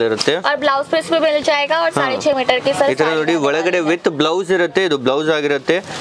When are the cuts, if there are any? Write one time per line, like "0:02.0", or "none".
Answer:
none